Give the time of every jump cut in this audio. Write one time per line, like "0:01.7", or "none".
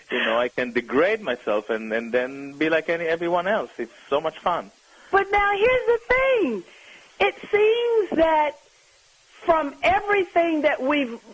0:09.9